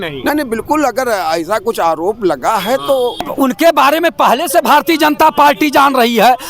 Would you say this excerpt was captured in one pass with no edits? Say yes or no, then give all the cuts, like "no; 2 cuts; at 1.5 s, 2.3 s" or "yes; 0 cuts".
no; 1 cut; at 3.3 s